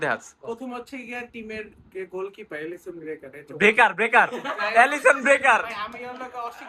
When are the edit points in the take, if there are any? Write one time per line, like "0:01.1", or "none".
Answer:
none

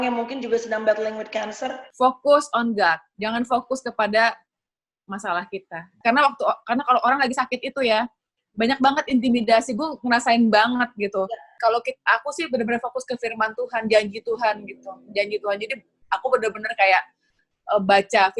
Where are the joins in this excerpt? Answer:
0:01.8
0:03.1
0:06.0
0:11.5

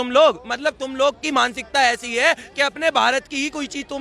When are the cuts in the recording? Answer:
none

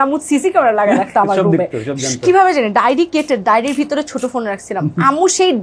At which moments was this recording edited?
none

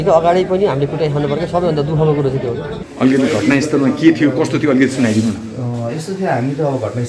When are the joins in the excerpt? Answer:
0:02.9

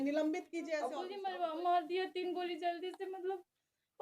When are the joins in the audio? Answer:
0:01.1

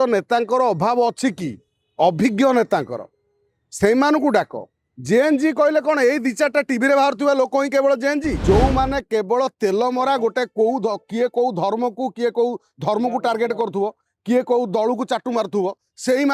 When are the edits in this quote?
0:08.4

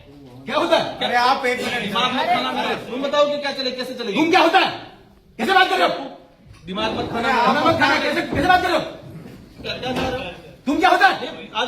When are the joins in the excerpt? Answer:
0:02.8

